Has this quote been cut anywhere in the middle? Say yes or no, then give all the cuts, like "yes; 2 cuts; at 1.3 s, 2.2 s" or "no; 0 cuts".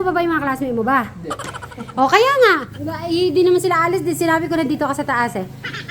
yes; 1 cut; at 2.7 s